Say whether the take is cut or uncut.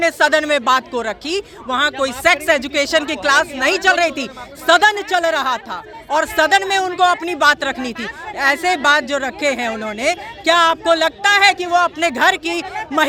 uncut